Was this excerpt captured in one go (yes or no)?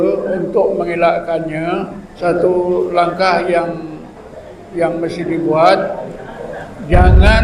no